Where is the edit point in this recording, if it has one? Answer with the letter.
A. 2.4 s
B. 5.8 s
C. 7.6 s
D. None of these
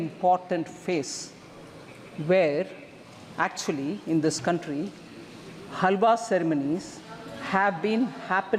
D